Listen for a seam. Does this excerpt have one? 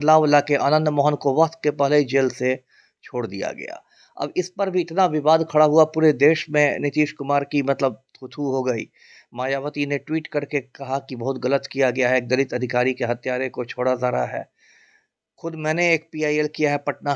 no; 0 cuts

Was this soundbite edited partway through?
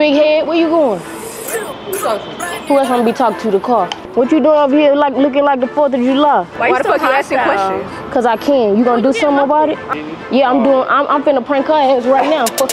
yes; 3 cuts; at 4.0 s, 6.5 s, 9.8 s

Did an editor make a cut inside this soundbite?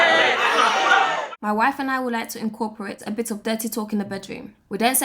yes; 1 cut; at 1.3 s

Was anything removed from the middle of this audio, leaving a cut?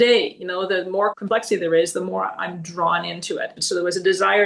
yes; 2 cuts; at 1.2 s, 3.6 s

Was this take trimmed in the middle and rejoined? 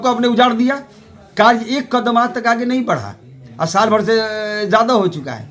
no; 0 cuts

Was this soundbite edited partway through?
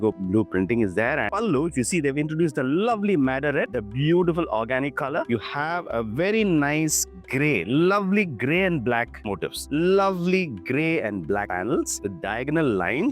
yes; 3 cuts; at 1.3 s, 5.3 s, 9.7 s

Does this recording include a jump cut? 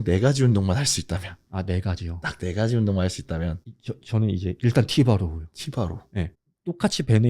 yes; 1 cut; at 6.3 s

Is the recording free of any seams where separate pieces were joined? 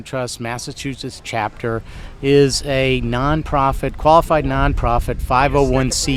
yes; 0 cuts

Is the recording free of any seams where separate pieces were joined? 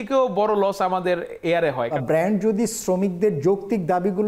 no; 1 cut; at 2.0 s

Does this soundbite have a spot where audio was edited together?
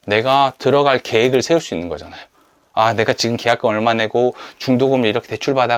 no; 0 cuts

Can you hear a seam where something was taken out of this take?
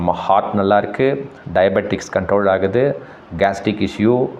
no; 0 cuts

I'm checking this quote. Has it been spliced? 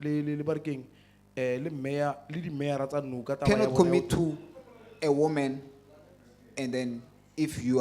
yes; 1 cut; at 3.4 s

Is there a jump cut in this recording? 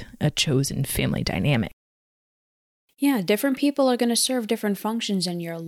no; 0 cuts

